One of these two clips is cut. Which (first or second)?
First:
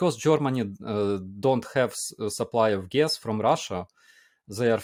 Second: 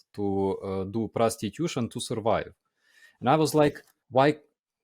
second